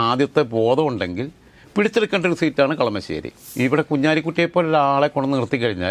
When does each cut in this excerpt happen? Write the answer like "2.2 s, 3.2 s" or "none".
3.4 s